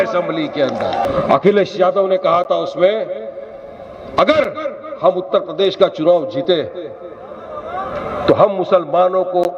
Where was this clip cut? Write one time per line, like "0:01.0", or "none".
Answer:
0:01.0